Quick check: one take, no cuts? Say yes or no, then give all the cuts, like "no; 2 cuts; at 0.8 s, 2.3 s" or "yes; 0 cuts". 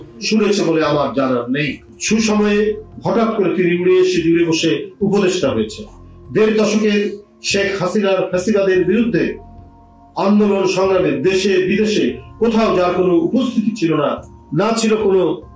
yes; 0 cuts